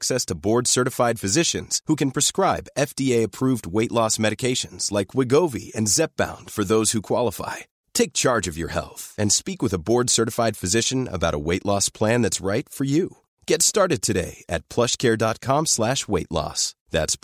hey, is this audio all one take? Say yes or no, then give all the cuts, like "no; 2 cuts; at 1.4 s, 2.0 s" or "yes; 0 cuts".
yes; 0 cuts